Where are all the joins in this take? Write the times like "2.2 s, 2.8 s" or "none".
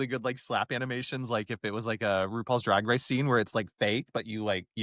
none

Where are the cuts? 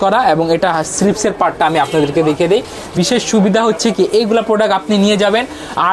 2.9 s

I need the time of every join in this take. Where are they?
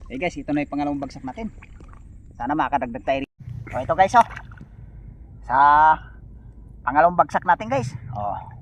3.4 s

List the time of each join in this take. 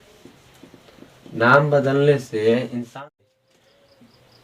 3.0 s

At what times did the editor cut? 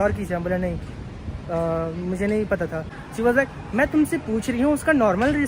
2.9 s

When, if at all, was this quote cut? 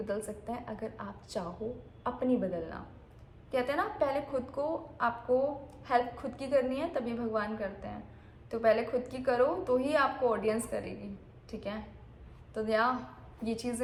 none

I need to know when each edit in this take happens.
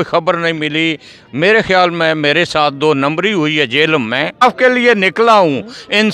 4.4 s

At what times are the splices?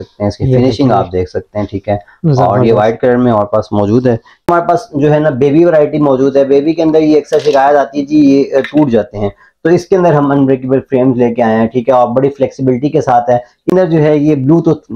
4.5 s, 13.7 s

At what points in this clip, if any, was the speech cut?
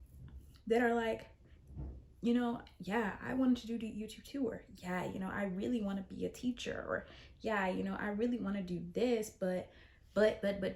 none

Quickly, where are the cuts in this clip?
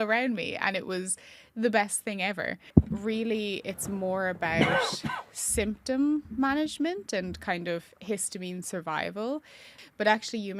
2.6 s, 9.7 s

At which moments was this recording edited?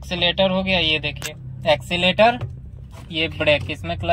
none

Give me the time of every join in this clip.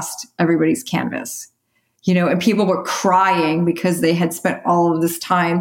none

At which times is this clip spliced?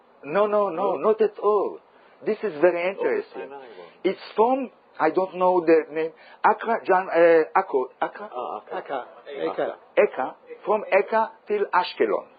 3.0 s

